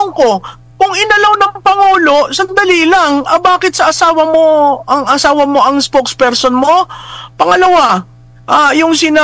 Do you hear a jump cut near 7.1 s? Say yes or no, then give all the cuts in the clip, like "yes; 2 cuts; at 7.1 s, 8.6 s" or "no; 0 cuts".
no; 0 cuts